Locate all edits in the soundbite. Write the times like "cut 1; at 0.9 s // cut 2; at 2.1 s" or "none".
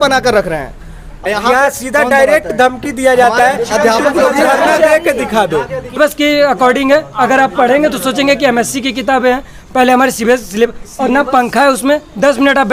cut 1; at 1.1 s // cut 2; at 6.0 s